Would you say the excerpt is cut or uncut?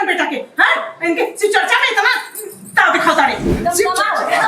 cut